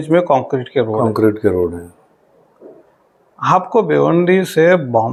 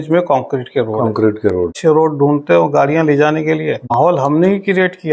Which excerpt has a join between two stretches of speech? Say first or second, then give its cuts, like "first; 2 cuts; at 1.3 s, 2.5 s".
second; 2 cuts; at 1.7 s, 4.0 s